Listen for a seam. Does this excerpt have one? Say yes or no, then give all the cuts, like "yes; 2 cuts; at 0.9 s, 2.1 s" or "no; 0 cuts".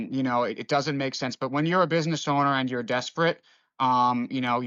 no; 0 cuts